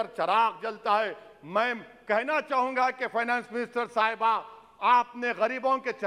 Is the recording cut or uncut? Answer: uncut